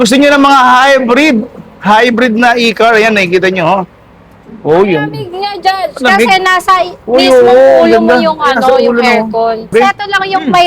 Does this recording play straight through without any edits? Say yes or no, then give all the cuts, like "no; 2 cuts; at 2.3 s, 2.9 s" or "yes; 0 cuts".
no; 1 cut; at 9.7 s